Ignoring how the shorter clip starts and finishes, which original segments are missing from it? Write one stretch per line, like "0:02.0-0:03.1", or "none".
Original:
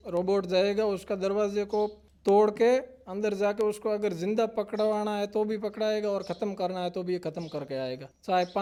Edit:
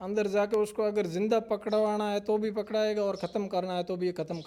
none